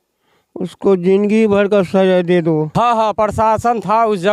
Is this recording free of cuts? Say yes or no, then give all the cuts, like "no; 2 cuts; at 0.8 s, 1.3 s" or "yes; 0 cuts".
no; 1 cut; at 2.7 s